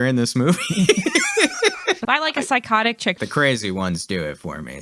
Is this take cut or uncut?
cut